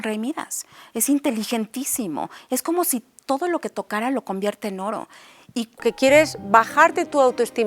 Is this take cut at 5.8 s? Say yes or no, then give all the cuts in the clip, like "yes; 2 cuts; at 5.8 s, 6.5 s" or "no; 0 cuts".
yes; 1 cut; at 5.8 s